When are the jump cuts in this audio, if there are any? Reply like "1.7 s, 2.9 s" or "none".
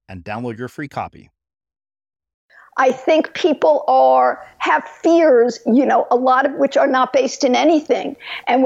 2.5 s

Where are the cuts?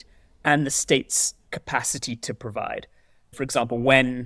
3.4 s

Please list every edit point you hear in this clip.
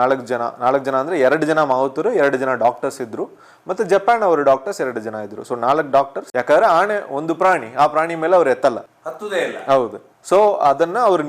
6.2 s

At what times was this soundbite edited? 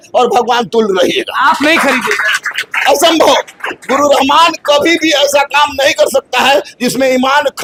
none

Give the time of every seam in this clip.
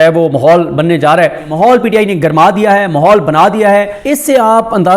1.5 s, 4.0 s

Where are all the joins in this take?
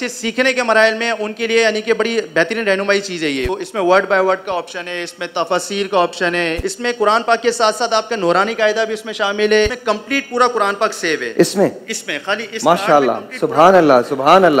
3.5 s, 6.6 s, 9.7 s

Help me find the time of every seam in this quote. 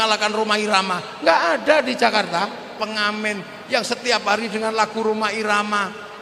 2.8 s

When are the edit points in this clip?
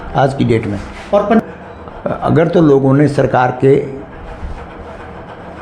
1.4 s

